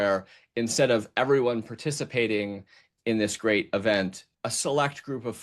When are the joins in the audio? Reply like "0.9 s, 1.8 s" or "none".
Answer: 4.2 s